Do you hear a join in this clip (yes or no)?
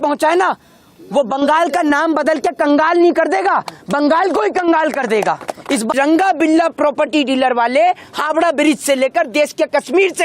yes